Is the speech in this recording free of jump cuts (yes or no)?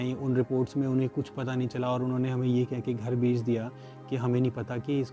yes